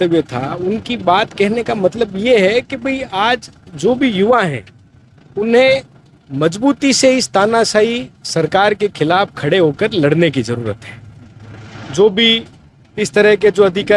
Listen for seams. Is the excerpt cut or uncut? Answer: uncut